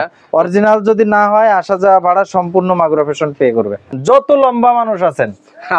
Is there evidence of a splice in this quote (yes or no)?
yes